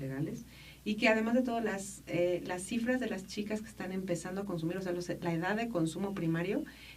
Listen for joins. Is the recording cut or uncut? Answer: cut